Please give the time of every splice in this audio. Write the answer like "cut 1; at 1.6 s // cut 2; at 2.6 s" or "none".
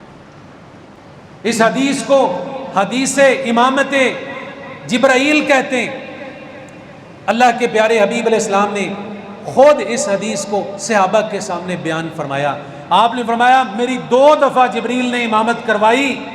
cut 1; at 1.0 s